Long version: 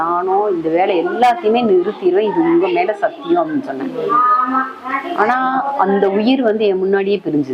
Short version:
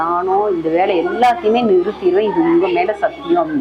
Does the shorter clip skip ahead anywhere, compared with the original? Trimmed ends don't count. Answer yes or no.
no